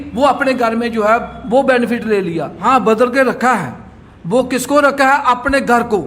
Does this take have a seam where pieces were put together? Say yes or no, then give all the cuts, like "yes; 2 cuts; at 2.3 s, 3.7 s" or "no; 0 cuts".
yes; 1 cut; at 2.5 s